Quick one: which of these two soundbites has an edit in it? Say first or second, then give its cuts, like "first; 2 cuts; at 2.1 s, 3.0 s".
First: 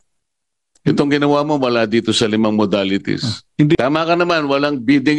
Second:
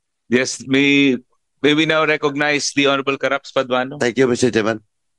first; 1 cut; at 3.8 s